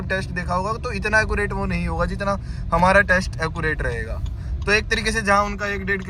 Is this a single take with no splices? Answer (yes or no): yes